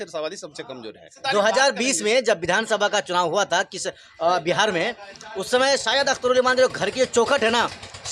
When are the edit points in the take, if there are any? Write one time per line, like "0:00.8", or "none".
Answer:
0:01.1